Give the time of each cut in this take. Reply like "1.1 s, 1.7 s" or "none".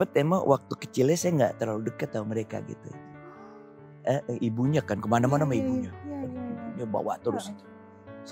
none